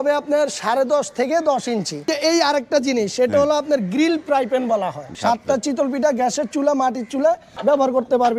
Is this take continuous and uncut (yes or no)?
no